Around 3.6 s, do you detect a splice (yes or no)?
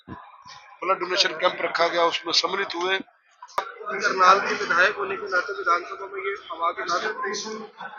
yes